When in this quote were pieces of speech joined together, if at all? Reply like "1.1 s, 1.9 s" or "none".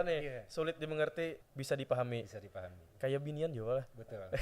1.5 s

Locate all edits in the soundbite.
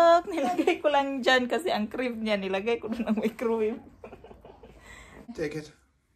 5.2 s

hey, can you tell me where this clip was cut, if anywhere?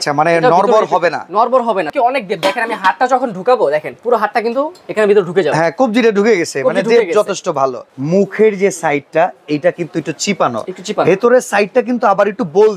1.9 s, 7.8 s

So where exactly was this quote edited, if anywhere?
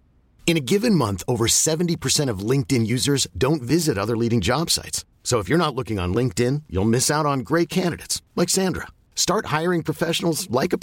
none

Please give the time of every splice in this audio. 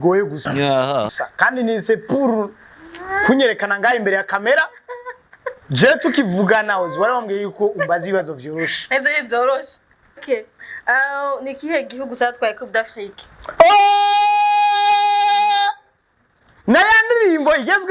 10.2 s

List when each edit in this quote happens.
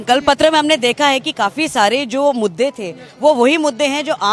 none

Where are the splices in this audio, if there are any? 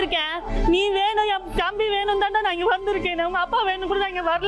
none

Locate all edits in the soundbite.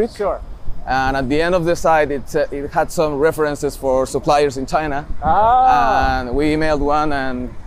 none

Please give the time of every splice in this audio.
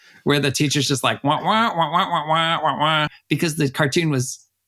3.2 s

